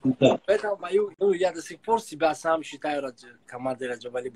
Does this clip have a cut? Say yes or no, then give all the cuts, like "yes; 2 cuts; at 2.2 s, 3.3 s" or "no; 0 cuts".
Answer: yes; 1 cut; at 1.1 s